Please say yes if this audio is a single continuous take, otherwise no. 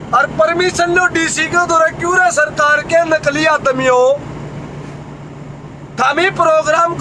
yes